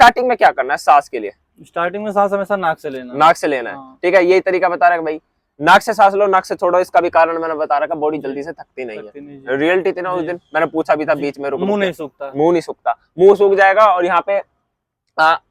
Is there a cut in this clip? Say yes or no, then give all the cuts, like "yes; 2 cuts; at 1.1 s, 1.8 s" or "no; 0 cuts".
no; 0 cuts